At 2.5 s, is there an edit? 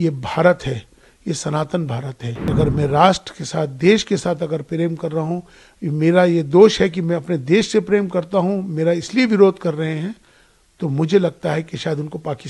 yes; 1 cut; at 2.5 s

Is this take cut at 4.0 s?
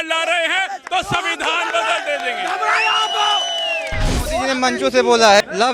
yes; 1 cut; at 4.0 s

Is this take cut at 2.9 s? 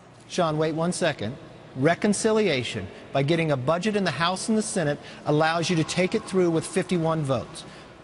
yes; 1 cut; at 2.9 s

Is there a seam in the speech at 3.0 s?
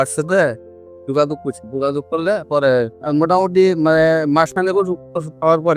yes; 1 cut; at 3.0 s

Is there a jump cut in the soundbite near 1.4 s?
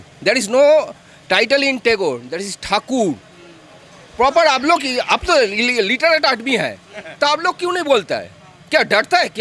no; 0 cuts

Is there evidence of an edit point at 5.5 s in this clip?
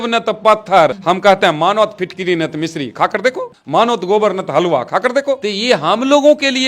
yes; 3 cuts; at 1.0 s, 3.5 s, 5.5 s

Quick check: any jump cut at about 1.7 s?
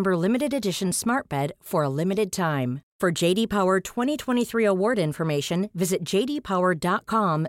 no; 0 cuts

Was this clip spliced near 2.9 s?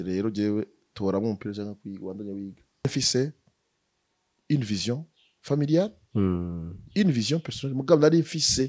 yes; 1 cut; at 2.9 s

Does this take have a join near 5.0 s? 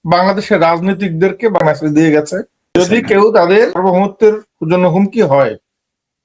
no; 3 cuts; at 1.6 s, 2.8 s, 3.8 s

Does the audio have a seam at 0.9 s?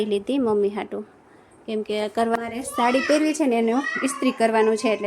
no; 1 cut; at 2.4 s

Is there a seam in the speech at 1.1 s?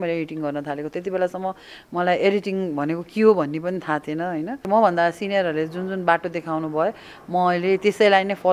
no; 1 cut; at 4.7 s

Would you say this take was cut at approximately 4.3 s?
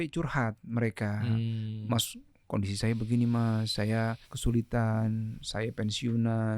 yes; 1 cut; at 4.3 s

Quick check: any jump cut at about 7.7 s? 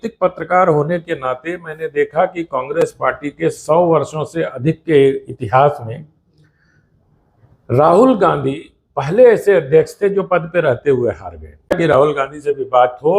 no; 1 cut; at 11.7 s

